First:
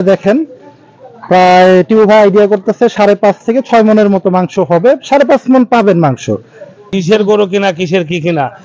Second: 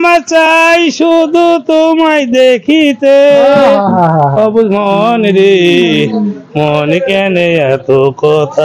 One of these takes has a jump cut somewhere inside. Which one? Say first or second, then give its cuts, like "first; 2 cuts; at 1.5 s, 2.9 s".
first; 1 cut; at 7.0 s